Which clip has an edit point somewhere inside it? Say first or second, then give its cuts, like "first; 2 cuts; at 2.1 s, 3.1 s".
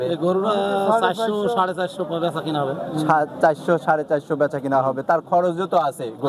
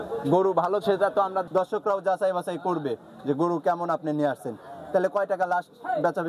second; 1 cut; at 1.4 s